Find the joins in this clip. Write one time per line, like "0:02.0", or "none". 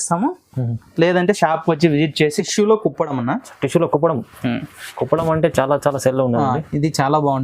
0:02.4